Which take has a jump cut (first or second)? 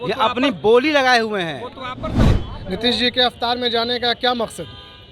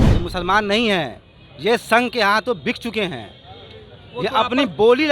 first